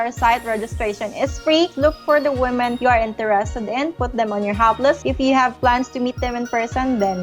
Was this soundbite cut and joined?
yes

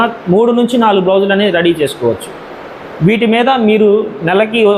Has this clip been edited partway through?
no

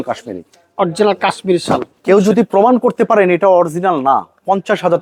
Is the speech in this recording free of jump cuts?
yes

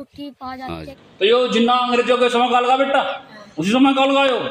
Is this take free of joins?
no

